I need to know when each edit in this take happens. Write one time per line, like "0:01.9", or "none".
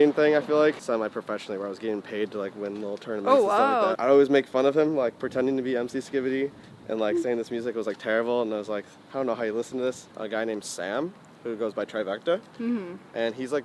0:00.8
0:04.0
0:10.1